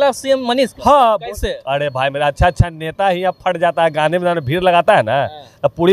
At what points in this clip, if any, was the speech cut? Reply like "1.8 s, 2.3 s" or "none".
none